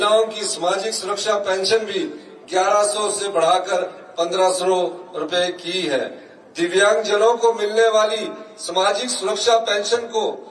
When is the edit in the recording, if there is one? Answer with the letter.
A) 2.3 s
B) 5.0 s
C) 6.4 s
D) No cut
D